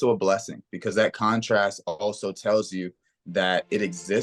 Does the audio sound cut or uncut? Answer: uncut